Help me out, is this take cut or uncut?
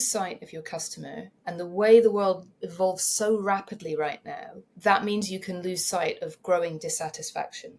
uncut